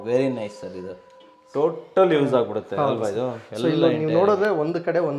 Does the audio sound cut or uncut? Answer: uncut